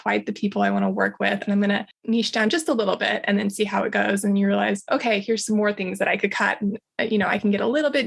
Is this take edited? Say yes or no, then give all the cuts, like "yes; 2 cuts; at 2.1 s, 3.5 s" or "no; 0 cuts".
yes; 1 cut; at 1.9 s